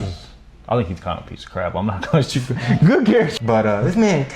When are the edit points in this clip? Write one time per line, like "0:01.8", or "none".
0:03.3